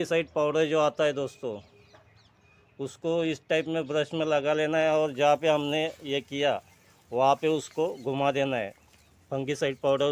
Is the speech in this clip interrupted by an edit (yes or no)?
no